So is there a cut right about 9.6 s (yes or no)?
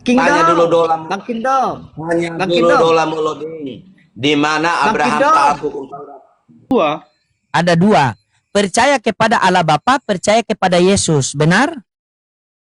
no